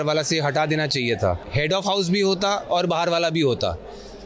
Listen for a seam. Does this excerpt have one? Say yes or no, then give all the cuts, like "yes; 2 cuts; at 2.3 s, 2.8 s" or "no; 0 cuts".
yes; 1 cut; at 1.5 s